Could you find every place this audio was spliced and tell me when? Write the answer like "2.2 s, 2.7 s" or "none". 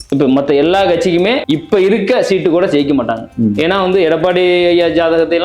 1.4 s